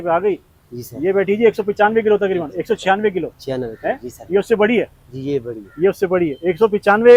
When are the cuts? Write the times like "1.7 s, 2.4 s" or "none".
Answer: none